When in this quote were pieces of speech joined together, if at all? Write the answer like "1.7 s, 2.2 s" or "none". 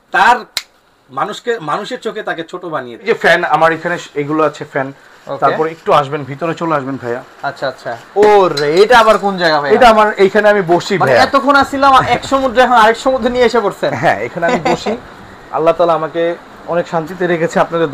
3.0 s